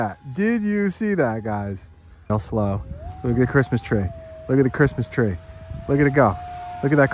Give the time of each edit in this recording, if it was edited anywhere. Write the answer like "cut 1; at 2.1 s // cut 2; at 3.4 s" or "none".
cut 1; at 2.3 s